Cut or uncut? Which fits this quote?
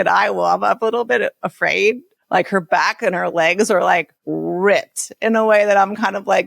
cut